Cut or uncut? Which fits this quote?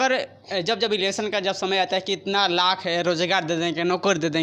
uncut